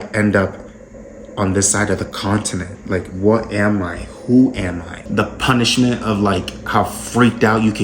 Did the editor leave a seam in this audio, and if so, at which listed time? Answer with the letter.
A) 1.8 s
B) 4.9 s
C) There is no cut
B